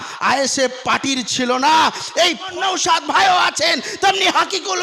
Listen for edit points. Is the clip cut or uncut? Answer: cut